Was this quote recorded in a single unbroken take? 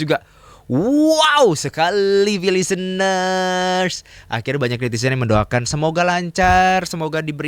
yes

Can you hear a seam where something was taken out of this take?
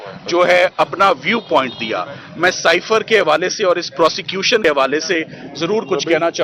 yes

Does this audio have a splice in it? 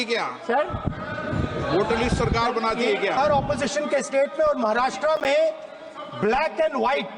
yes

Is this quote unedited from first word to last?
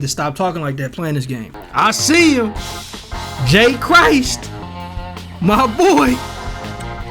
no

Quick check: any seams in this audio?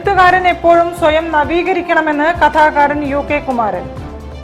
no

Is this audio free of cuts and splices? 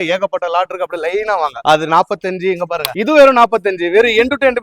yes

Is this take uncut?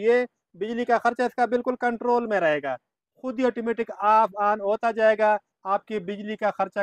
yes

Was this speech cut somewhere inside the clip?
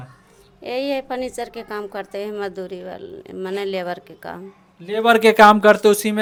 no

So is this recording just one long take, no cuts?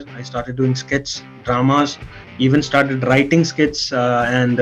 yes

